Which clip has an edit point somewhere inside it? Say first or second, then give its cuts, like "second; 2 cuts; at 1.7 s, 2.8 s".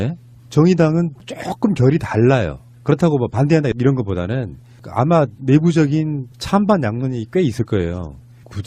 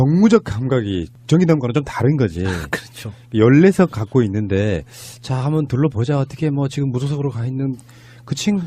second; 1 cut; at 4.6 s